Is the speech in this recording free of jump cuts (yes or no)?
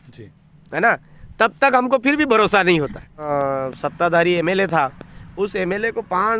no